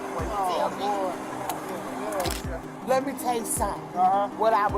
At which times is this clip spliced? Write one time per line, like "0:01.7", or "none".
0:02.3